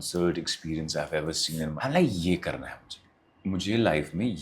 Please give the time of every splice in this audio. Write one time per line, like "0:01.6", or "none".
0:01.8